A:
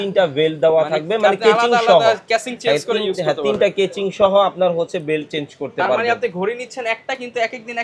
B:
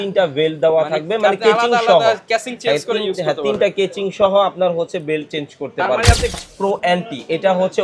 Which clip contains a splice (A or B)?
B